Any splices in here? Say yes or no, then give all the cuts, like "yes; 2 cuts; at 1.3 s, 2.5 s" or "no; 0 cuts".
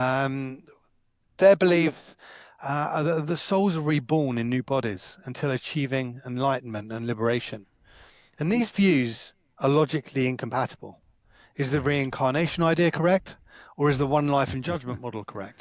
no; 0 cuts